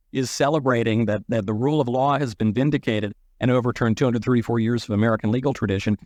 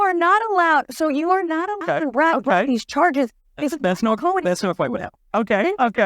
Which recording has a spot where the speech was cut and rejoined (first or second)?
second